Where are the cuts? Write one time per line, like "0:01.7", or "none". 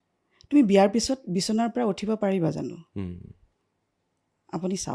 none